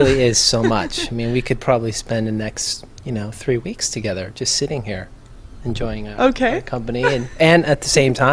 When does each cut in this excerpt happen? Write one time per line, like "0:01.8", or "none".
0:05.9